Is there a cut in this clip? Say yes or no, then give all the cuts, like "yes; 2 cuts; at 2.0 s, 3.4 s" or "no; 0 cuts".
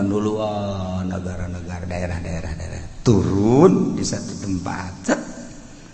no; 0 cuts